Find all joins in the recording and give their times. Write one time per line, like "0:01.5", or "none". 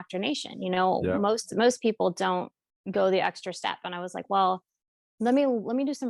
none